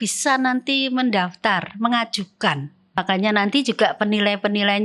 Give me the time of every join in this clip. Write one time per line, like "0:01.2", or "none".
0:02.8